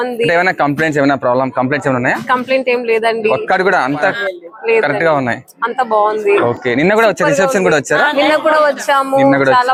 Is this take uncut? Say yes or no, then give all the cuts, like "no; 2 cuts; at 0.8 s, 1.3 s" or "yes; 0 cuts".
yes; 0 cuts